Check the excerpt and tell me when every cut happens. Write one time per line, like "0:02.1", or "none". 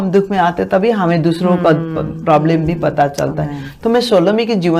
none